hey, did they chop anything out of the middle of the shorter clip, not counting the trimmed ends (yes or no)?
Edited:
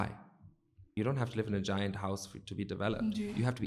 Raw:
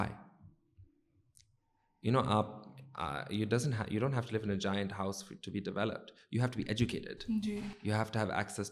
yes